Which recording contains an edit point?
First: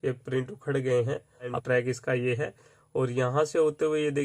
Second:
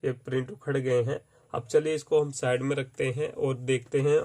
first; 1 cut; at 1.6 s

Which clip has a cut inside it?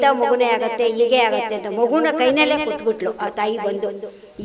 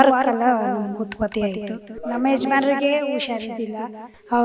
second; 1 cut; at 1.9 s

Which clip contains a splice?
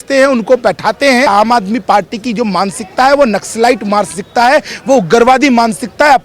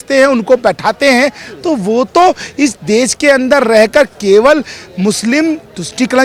first; 1 cut; at 1.3 s

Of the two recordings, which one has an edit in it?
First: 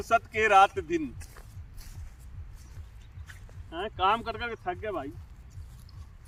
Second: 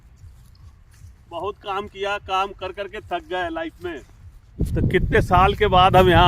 second; 1 cut; at 4.5 s

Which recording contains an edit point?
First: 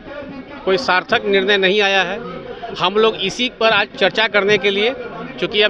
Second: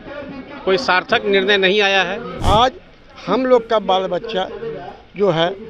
second; 1 cut; at 2.3 s

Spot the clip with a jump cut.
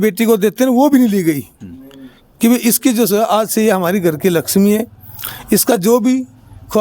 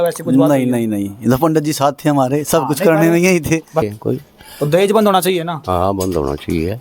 second; 1 cut; at 3.8 s

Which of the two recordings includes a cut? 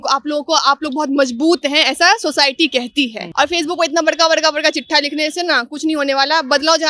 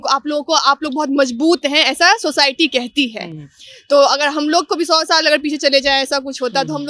first; 1 cut; at 3.2 s

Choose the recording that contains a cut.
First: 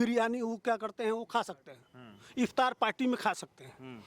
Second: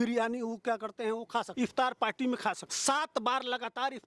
second; 2 cuts; at 1.5 s, 2.7 s

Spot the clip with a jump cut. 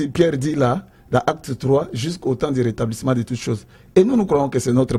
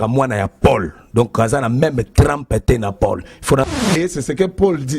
second; 1 cut; at 3.8 s

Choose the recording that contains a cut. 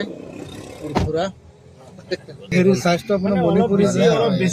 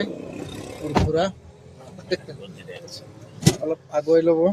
first; 1 cut; at 2.5 s

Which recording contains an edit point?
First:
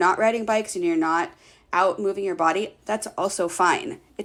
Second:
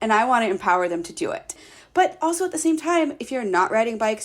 second; 1 cut; at 1.7 s

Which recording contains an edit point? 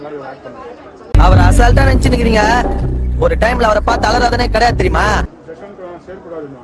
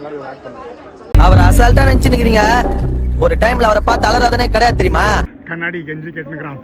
second; 1 cut; at 5.4 s

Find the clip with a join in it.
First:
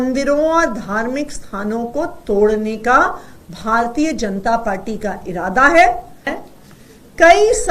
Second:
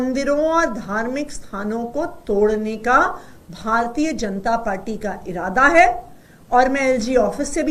first; 1 cut; at 6.3 s

